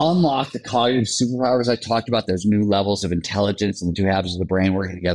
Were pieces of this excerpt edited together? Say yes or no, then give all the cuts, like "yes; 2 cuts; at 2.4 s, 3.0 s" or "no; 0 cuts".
no; 0 cuts